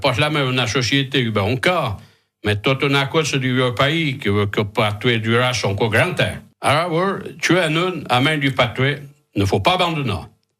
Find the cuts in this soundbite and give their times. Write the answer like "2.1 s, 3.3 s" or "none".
6.4 s